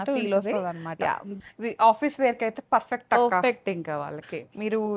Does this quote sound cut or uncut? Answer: cut